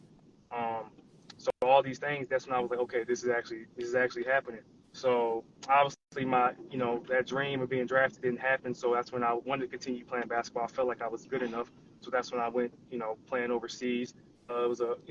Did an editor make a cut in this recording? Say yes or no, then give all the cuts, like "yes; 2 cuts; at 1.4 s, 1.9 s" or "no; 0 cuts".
no; 0 cuts